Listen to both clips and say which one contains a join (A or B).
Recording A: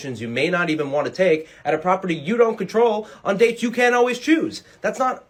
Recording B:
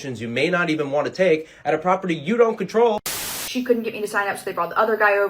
B